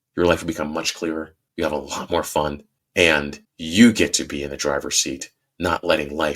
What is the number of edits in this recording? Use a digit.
2